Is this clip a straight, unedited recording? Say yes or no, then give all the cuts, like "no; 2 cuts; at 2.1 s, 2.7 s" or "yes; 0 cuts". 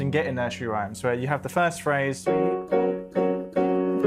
yes; 0 cuts